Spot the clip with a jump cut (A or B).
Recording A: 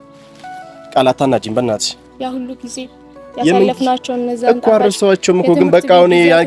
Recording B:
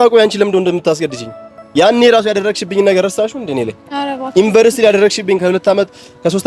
A